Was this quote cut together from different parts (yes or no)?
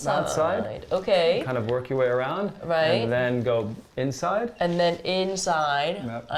no